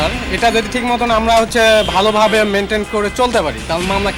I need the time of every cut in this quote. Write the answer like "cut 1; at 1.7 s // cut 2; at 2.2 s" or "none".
none

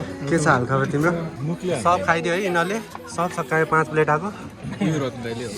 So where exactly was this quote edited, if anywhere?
cut 1; at 1.3 s

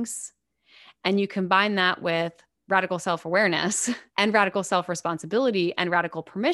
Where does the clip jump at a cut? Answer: cut 1; at 4.1 s

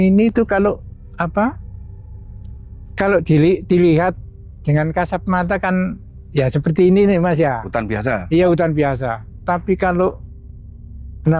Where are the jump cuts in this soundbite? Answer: none

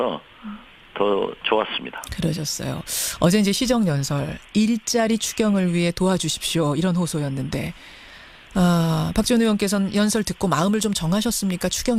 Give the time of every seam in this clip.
cut 1; at 2.9 s

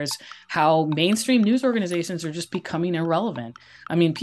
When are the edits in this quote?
none

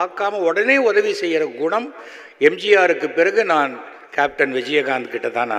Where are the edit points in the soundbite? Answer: none

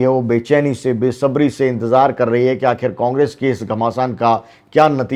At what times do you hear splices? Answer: none

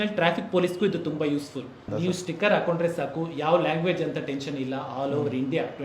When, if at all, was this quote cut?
cut 1; at 1.9 s

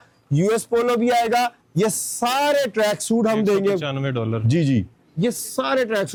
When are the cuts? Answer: none

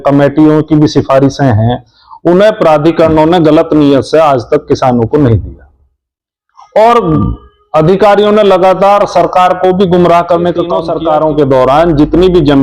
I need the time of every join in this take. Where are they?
cut 1; at 10.8 s

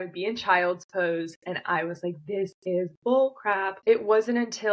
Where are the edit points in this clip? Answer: cut 1; at 3.7 s

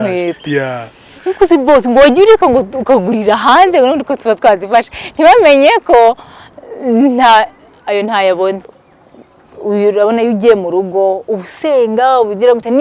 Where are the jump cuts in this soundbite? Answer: cut 1; at 8.6 s

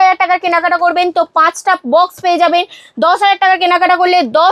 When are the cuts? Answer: none

